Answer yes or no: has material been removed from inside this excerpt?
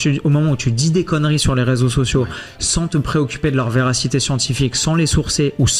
no